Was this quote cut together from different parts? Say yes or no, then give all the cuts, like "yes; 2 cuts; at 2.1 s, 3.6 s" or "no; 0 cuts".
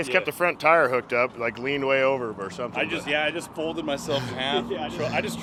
no; 0 cuts